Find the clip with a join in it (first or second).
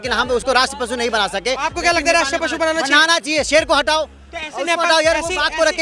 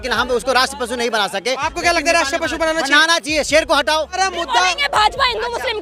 second